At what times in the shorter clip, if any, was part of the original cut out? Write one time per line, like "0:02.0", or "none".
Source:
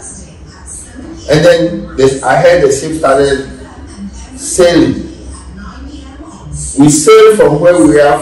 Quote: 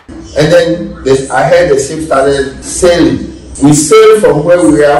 0:02.6
0:03.4